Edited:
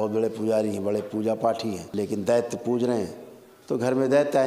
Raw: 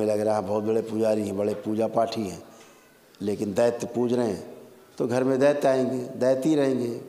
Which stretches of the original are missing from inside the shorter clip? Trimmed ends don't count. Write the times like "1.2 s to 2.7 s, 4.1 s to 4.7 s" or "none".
2.4 s to 3.1 s